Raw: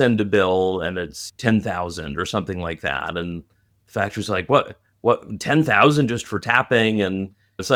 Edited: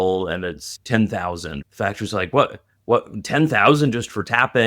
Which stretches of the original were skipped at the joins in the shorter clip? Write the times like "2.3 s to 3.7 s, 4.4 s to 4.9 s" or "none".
2.1 s to 3.7 s